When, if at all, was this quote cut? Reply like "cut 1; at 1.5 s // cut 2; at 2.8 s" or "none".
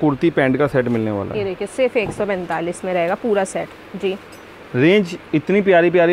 none